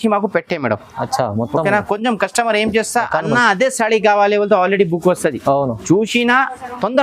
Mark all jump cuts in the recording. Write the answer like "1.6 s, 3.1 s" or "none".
none